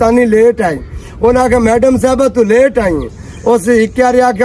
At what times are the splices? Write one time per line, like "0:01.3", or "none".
none